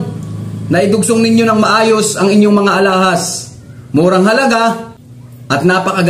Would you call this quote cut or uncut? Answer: uncut